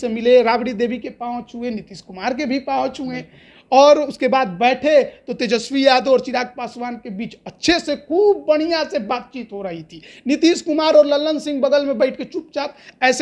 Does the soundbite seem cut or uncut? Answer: uncut